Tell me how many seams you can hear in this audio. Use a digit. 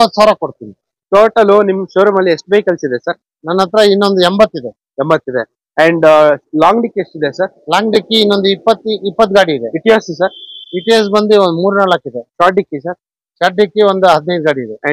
1